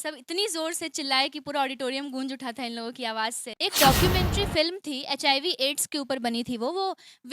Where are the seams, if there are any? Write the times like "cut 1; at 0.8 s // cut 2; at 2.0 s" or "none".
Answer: cut 1; at 3.5 s